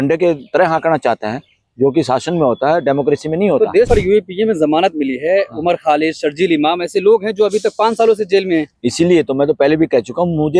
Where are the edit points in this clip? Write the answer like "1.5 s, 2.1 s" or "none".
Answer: 3.9 s